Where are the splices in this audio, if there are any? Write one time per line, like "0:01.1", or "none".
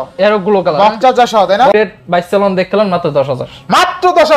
0:01.7